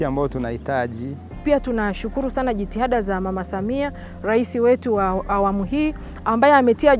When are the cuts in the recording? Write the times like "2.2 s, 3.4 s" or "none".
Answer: 1.4 s